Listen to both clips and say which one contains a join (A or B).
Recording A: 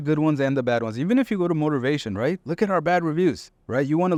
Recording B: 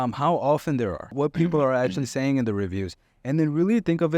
B